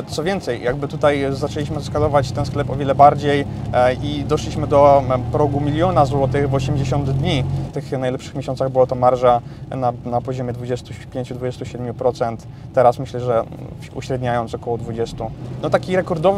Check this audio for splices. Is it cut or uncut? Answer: cut